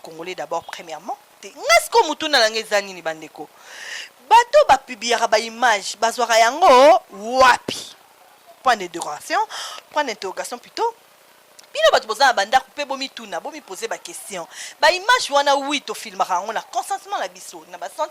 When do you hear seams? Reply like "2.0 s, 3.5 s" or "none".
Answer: 1.5 s